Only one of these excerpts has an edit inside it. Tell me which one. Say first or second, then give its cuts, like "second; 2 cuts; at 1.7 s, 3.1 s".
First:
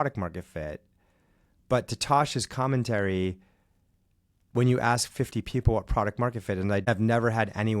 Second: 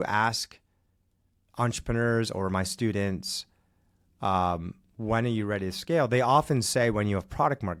first; 1 cut; at 6.8 s